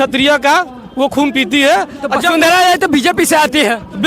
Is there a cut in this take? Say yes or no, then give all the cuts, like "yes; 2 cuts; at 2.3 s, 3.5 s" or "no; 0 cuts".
no; 0 cuts